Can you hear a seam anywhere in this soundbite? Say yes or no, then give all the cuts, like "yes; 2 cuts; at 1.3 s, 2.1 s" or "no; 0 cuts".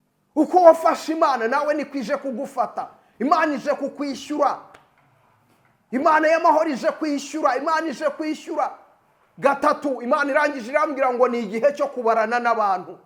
no; 0 cuts